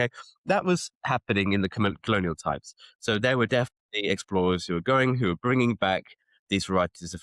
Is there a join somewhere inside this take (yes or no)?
no